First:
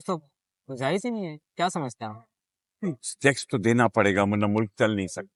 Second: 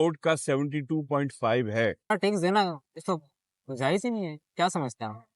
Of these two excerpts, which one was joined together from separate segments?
second; 1 cut; at 2.1 s

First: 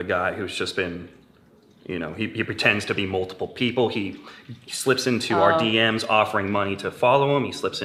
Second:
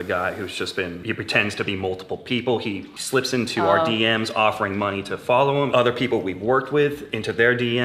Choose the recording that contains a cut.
second; 3 cuts; at 1.0 s, 2.9 s, 5.7 s

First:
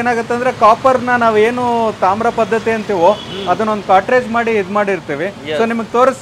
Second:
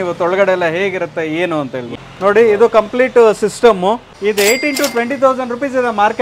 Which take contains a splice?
second; 2 cuts; at 1.9 s, 4.1 s

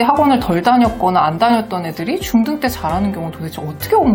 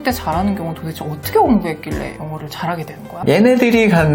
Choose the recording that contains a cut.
second; 1 cut; at 3.2 s

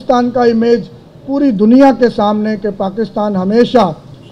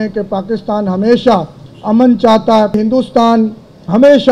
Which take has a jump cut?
second; 1 cut; at 2.8 s

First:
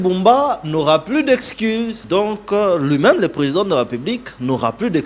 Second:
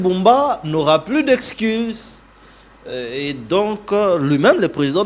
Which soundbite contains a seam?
first; 1 cut; at 2.0 s

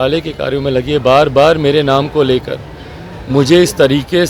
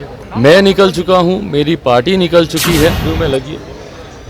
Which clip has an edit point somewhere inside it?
second; 1 cut; at 3.1 s

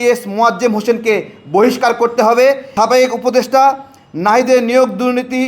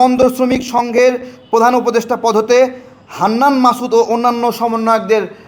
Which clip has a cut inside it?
first; 1 cut; at 2.7 s

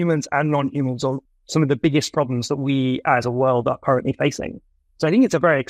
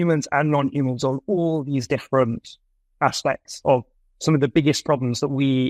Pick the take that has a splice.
first; 1 cut; at 1.2 s

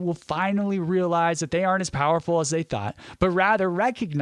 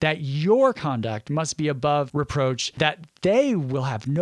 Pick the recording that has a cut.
second; 1 cut; at 2.3 s

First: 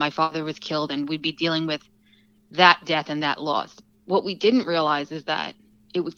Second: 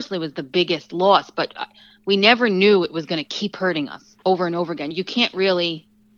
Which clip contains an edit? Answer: second; 1 cut; at 4.0 s

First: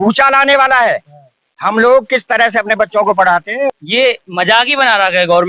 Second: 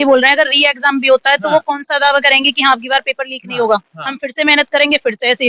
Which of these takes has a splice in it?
first; 1 cut; at 3.7 s

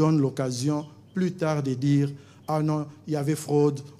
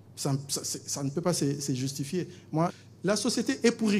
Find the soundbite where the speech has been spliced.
second; 1 cut; at 2.7 s

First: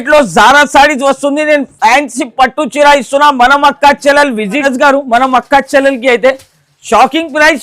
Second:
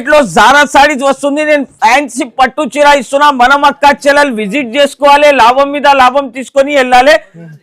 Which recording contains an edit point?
first; 1 cut; at 4.6 s

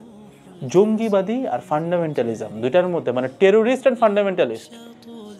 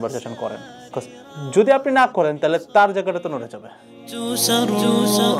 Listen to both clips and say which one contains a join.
second; 1 cut; at 4.1 s

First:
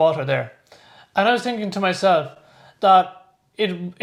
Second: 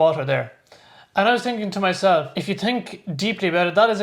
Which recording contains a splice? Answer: second; 1 cut; at 2.3 s

